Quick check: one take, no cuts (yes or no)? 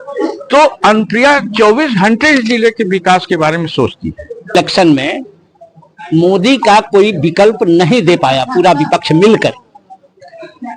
no